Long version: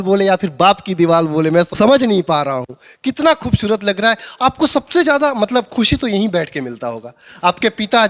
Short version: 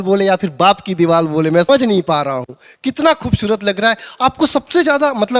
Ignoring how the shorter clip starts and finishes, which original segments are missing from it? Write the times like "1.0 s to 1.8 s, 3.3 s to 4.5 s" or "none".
1.7 s to 1.9 s